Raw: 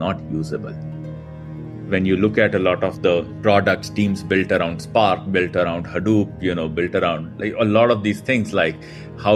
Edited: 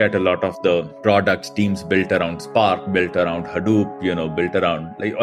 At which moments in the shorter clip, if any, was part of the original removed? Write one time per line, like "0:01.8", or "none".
none